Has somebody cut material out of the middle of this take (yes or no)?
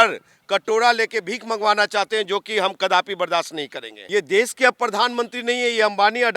yes